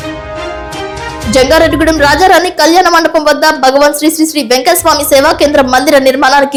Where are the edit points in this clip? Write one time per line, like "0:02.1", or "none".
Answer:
none